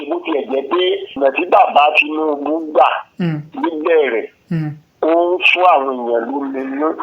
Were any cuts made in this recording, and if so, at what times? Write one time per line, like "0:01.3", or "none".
0:01.2